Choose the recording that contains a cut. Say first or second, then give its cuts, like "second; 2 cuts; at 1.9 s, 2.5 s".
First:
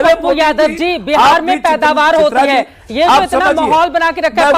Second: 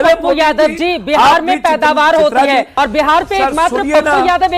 second; 1 cut; at 2.7 s